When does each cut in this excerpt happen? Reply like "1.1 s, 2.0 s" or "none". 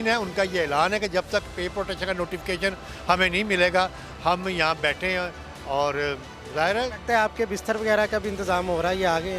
none

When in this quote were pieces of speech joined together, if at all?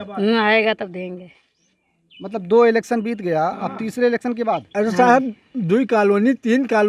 4.7 s

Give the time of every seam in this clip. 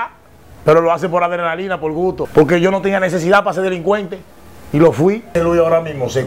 2.2 s, 5.3 s

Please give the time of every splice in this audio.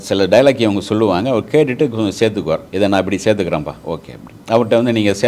2.7 s

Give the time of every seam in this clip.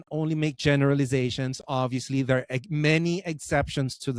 none

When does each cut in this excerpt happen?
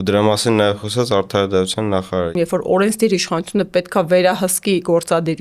2.3 s

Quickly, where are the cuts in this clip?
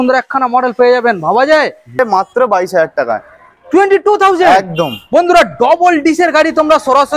2.0 s

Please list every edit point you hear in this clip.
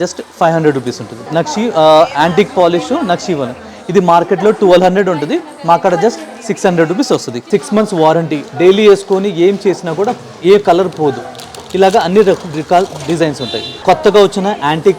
1.2 s, 7.4 s, 13.7 s

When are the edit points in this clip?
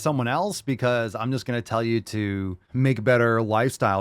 2.7 s

